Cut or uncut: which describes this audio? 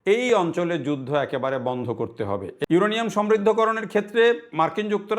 cut